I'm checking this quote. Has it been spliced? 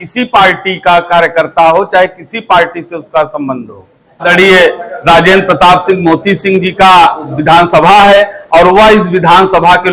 yes; 2 cuts; at 4.2 s, 7.3 s

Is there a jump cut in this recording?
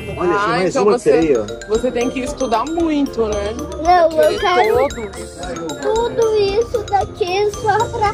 no; 0 cuts

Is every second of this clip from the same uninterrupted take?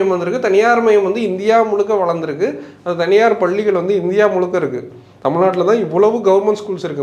yes; 0 cuts

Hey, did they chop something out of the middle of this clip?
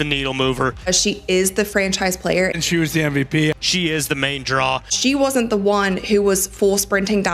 no; 0 cuts

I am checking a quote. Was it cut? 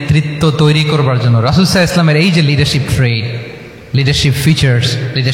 no; 0 cuts

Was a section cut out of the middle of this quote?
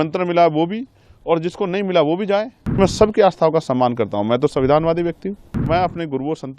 yes; 2 cuts; at 2.8 s, 5.6 s

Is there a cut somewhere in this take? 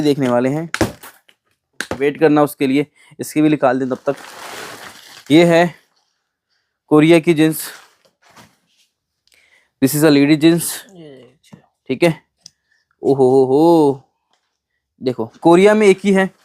yes; 1 cut; at 1.9 s

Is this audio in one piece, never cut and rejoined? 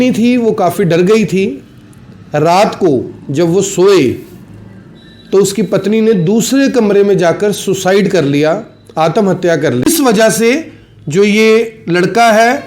no; 1 cut; at 9.9 s

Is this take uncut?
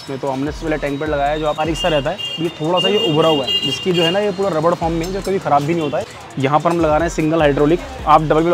no; 2 cuts; at 1.6 s, 6.1 s

